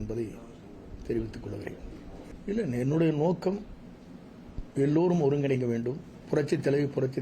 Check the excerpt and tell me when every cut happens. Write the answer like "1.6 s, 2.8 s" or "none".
6.1 s